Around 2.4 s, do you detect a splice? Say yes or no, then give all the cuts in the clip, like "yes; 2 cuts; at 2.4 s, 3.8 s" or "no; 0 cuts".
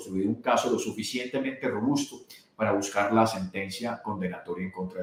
no; 0 cuts